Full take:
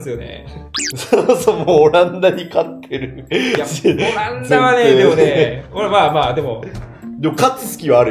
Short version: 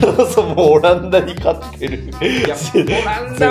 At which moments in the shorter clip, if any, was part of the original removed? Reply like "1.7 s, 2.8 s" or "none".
none